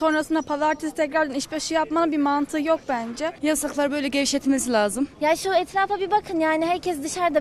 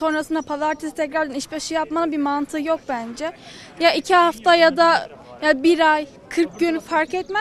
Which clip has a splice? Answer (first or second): first